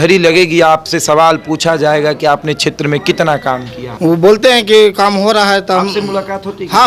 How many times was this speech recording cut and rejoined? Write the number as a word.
one